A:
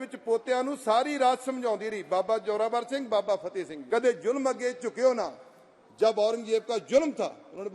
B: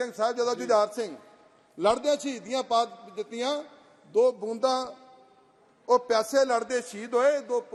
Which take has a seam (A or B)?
A